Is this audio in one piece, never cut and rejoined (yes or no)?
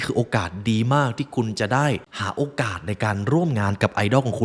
no